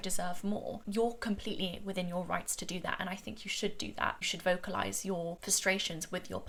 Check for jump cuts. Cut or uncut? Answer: uncut